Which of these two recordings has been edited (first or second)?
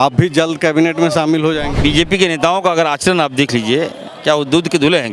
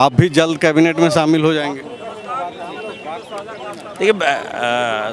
first